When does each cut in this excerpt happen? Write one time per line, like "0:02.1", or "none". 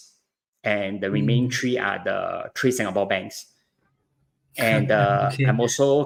none